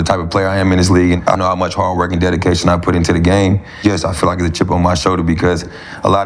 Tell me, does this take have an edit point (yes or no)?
yes